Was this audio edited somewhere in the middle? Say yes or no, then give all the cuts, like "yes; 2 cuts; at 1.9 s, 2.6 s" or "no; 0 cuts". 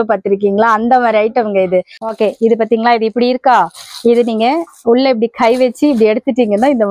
yes; 1 cut; at 2.0 s